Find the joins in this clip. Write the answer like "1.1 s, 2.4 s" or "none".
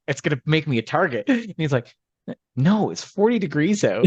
none